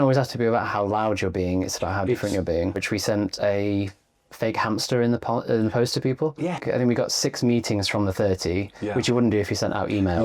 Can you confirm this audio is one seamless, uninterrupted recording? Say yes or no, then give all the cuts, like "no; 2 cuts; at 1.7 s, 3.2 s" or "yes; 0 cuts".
no; 2 cuts; at 2.8 s, 6.6 s